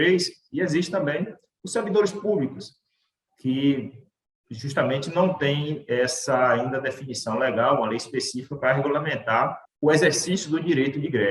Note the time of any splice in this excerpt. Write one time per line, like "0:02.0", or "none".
0:09.6